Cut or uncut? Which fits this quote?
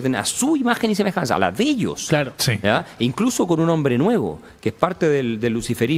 uncut